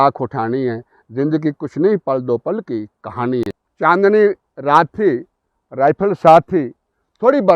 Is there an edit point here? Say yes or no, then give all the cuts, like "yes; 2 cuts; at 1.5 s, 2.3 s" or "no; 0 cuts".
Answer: yes; 1 cut; at 3.5 s